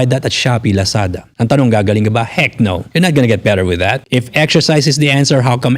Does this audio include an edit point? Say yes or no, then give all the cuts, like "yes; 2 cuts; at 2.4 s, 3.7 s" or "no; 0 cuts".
yes; 3 cuts; at 1.2 s, 2.8 s, 4.0 s